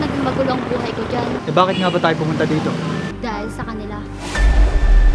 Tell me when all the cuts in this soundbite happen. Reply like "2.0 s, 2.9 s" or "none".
1.4 s, 3.1 s